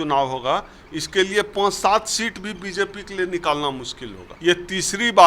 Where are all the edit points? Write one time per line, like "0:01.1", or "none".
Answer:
0:04.3